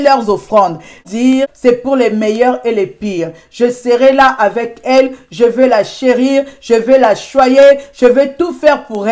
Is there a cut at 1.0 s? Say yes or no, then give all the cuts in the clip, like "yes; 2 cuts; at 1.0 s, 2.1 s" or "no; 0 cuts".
yes; 1 cut; at 1.0 s